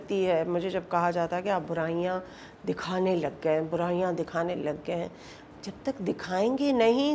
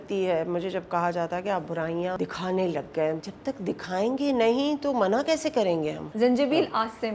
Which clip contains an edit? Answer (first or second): second